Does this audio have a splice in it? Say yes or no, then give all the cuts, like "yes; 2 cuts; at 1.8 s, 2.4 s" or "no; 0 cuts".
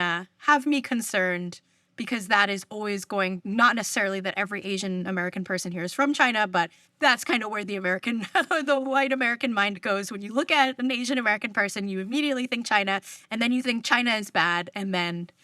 yes; 1 cut; at 6.8 s